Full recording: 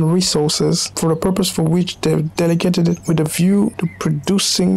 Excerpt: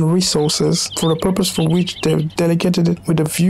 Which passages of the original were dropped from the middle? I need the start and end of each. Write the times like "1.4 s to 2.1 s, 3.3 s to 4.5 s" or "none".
none